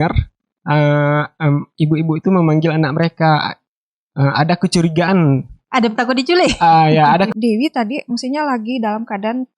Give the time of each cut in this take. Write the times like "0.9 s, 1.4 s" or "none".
7.3 s